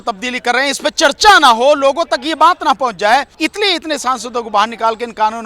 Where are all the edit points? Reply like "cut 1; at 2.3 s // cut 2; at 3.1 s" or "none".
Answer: cut 1; at 3.3 s